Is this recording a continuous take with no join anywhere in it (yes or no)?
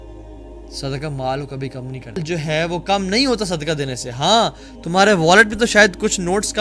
no